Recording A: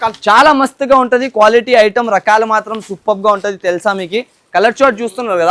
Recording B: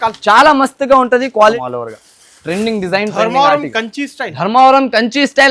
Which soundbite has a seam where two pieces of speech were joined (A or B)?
B